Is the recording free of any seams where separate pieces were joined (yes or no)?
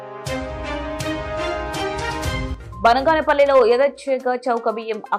yes